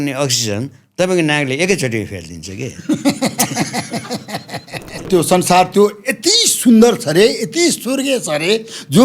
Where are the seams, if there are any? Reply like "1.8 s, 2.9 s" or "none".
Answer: 5.0 s